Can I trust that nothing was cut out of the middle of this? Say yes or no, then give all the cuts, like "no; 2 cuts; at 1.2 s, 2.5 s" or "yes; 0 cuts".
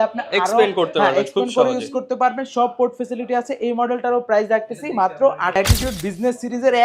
no; 1 cut; at 5.5 s